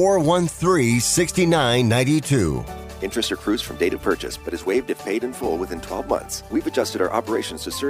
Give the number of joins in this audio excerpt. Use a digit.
1